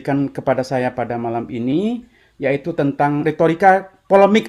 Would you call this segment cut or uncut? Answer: cut